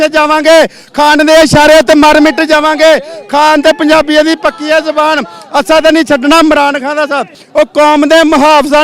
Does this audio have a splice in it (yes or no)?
yes